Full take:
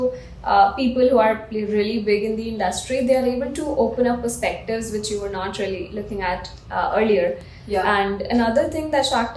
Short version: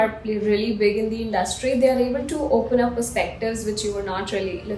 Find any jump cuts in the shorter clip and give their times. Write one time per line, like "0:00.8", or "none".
none